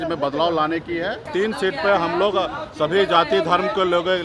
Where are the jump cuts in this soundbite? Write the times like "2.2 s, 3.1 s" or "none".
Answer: 1.3 s